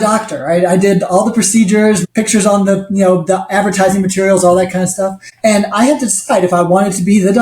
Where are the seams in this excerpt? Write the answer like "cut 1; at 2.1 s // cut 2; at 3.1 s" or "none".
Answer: cut 1; at 2.0 s // cut 2; at 5.2 s

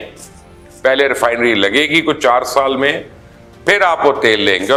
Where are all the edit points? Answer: none

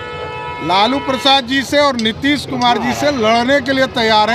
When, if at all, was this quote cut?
none

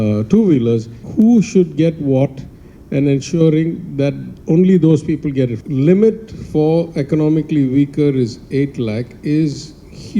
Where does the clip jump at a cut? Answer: cut 1; at 1.0 s // cut 2; at 5.6 s

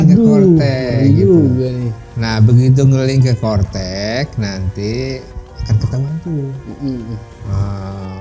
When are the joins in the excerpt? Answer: none

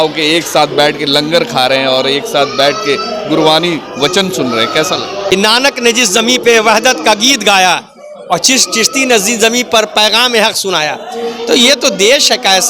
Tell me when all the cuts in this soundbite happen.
cut 1; at 5.1 s

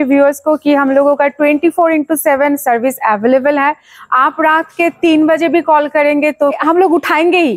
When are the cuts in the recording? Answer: cut 1; at 6.6 s

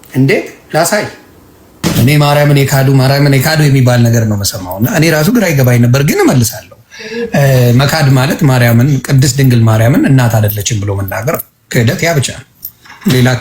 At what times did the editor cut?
cut 1; at 1.8 s

